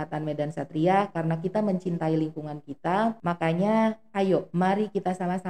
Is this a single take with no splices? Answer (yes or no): no